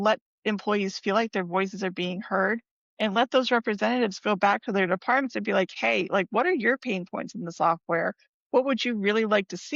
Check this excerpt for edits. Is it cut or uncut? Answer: uncut